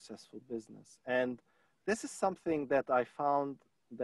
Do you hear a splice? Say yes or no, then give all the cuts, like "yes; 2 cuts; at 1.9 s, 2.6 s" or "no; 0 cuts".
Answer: no; 0 cuts